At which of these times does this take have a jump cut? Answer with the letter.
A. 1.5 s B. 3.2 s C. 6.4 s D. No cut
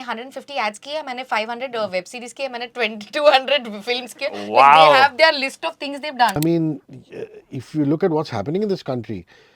C